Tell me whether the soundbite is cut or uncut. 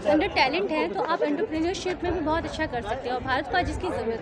uncut